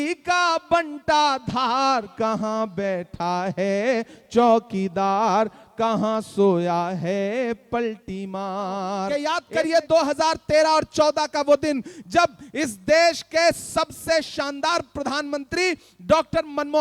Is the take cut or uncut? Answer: cut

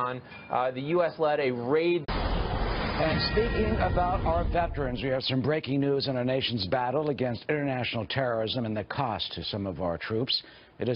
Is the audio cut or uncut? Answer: uncut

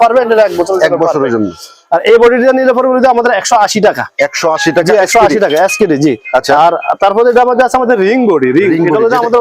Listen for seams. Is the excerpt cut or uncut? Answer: uncut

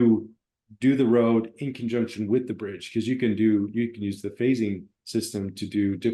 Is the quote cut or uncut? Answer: uncut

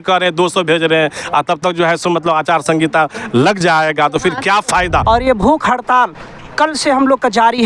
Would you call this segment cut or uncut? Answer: cut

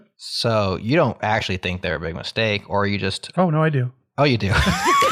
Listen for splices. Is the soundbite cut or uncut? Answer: uncut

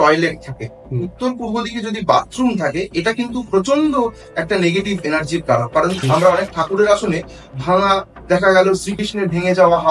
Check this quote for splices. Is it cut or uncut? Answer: cut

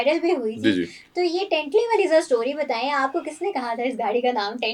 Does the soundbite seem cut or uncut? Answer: uncut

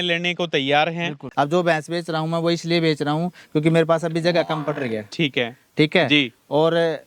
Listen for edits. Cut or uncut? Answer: cut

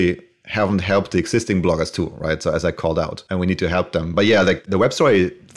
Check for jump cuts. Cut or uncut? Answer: cut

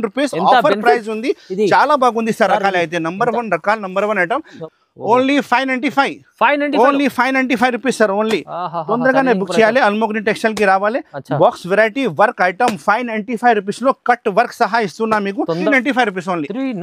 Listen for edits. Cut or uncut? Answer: cut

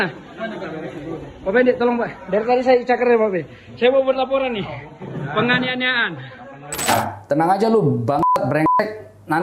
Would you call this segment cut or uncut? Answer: cut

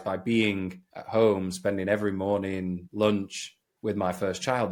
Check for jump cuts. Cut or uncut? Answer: uncut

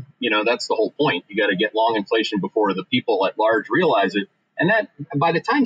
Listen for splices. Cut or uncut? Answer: uncut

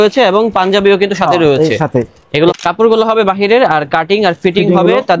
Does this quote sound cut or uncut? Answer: cut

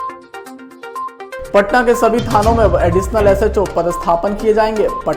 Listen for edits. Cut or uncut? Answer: cut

